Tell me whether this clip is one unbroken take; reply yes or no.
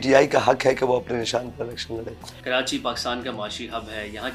yes